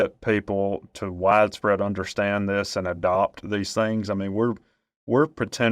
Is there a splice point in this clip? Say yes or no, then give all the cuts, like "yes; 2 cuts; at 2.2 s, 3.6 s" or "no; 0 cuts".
no; 0 cuts